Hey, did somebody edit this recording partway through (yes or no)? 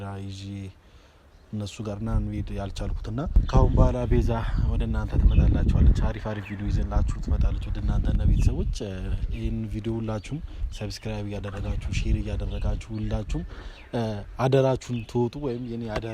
yes